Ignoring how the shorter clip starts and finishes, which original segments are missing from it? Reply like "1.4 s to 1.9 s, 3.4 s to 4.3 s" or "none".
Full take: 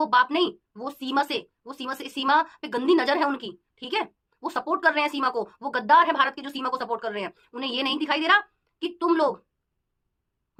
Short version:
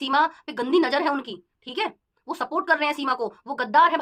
none